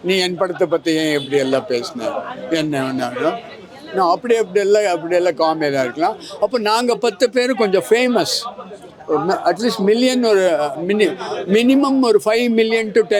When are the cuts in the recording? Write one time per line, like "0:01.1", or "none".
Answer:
none